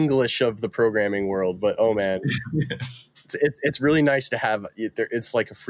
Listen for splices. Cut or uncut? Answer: uncut